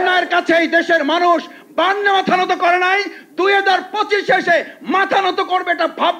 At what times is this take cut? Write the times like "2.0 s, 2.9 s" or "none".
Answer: none